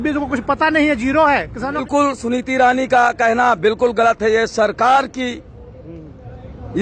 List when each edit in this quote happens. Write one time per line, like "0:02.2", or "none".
0:01.9